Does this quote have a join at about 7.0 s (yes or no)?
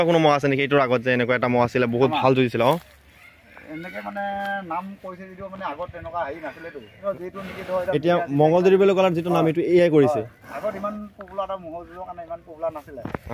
yes